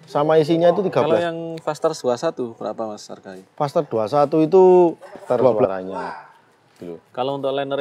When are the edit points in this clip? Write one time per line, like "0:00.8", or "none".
0:01.1
0:05.7

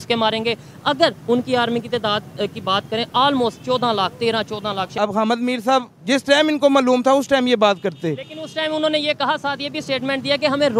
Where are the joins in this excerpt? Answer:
0:04.9

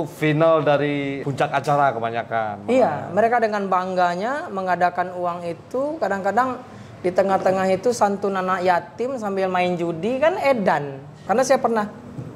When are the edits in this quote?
0:01.2
0:11.2

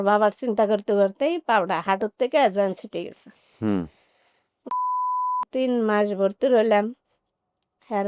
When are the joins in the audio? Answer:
none

